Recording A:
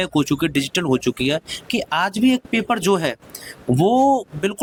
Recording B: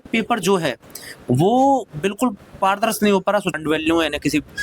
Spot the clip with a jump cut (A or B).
B